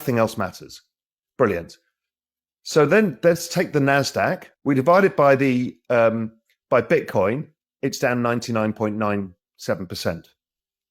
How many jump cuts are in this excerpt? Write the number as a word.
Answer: one